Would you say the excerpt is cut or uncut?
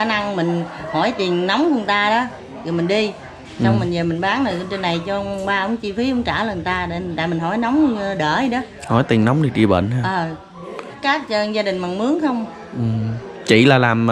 cut